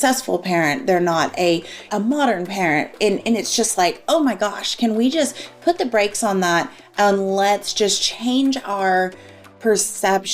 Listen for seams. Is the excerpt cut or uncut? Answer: cut